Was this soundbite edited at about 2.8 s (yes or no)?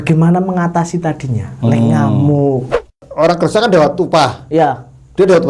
yes